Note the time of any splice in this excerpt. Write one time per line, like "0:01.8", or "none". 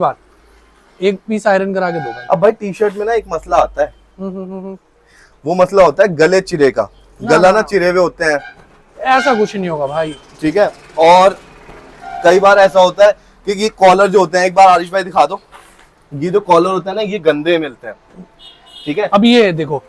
none